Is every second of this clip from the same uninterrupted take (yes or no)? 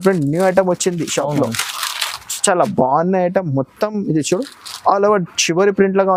yes